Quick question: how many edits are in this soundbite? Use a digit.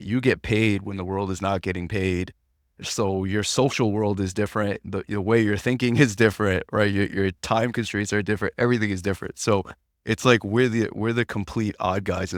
0